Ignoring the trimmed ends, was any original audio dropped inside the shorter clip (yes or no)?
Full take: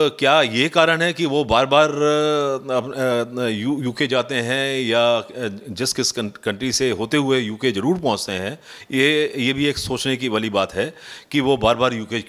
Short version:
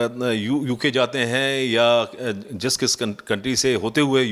no